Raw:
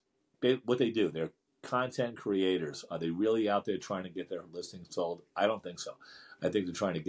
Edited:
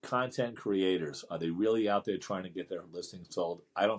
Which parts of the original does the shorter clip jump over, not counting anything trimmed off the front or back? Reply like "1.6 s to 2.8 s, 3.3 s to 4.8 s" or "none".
none